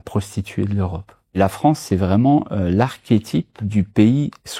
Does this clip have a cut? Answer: yes; 2 cuts; at 1.4 s, 3.6 s

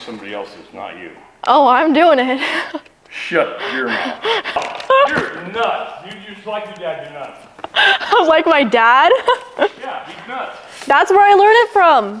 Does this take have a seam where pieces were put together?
yes; 1 cut; at 4.6 s

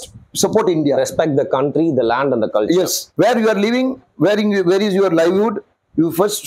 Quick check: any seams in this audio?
yes; 1 cut; at 3.0 s

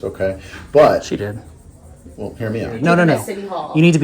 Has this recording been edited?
yes; 1 cut; at 2.7 s

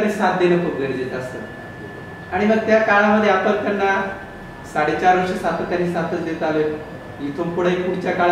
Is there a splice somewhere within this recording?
no; 0 cuts

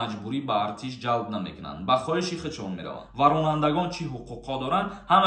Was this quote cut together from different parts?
yes; 1 cut; at 3.0 s

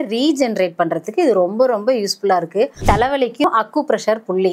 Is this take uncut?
no; 1 cut; at 2.7 s

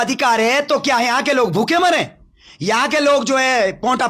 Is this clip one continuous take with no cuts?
yes; 0 cuts

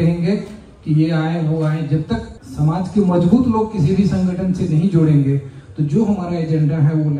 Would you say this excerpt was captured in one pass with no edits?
no; 1 cut; at 2.4 s

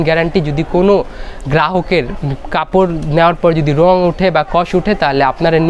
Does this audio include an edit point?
no; 0 cuts

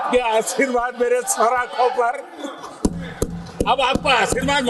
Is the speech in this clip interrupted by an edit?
no; 0 cuts

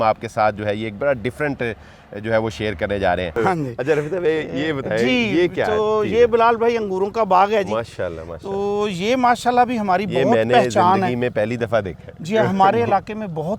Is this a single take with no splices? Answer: no; 1 cut; at 3.4 s

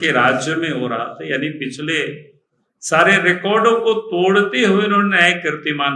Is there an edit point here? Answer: no; 0 cuts

